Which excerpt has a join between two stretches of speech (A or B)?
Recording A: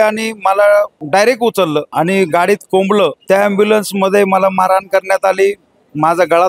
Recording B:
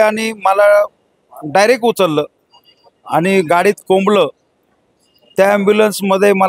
A